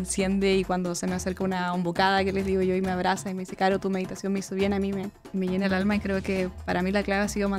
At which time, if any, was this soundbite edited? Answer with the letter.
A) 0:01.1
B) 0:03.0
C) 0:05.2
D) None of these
C